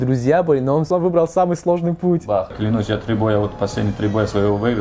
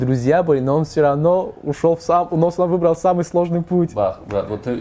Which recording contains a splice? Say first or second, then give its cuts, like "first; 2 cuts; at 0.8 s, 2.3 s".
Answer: first; 2 cuts; at 0.9 s, 2.6 s